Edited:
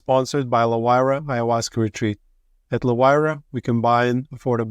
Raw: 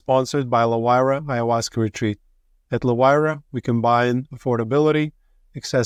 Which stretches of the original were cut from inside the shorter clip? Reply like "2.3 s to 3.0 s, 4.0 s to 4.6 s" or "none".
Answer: none